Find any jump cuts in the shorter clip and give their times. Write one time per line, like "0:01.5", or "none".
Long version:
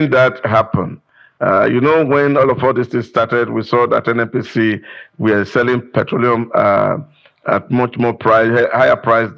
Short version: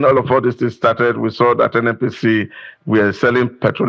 none